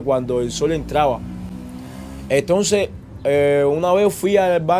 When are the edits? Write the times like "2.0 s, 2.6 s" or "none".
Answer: none